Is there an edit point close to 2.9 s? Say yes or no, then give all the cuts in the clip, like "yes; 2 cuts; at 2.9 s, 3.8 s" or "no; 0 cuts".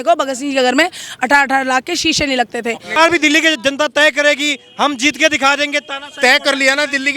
yes; 1 cut; at 2.9 s